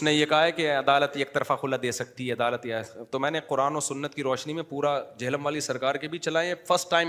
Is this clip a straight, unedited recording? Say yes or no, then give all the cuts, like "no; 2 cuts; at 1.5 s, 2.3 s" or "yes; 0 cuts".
yes; 0 cuts